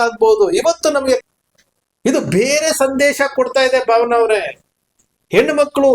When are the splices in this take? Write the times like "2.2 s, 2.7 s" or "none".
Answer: 1.2 s